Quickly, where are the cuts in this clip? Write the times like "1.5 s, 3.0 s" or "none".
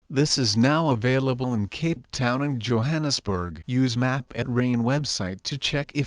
none